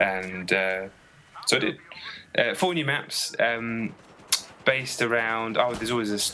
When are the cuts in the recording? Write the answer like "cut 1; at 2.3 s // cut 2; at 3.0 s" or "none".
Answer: cut 1; at 2.6 s